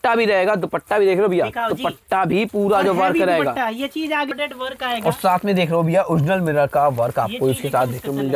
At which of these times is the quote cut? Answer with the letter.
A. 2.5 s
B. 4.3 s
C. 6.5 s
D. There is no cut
B